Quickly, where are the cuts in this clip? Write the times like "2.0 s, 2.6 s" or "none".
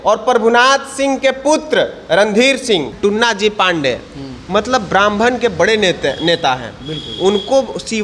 2.9 s